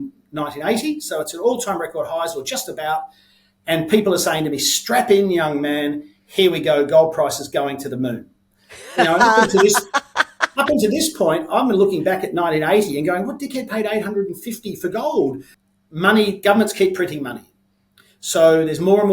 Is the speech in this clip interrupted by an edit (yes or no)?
yes